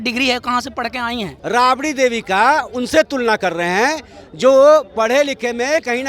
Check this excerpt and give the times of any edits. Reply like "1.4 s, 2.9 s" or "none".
1.3 s